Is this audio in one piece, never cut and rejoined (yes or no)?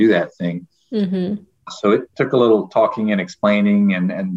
no